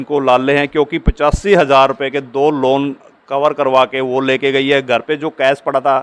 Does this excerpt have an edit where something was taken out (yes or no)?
no